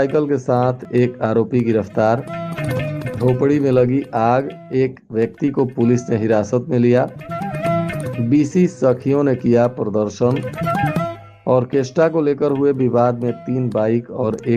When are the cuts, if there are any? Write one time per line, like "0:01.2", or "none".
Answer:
none